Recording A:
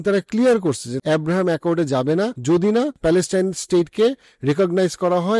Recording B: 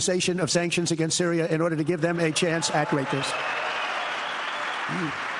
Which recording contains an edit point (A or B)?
A